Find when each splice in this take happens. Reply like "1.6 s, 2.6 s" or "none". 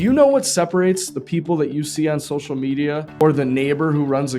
3.2 s